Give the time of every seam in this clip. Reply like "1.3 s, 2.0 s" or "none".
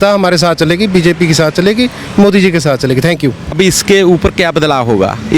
3.5 s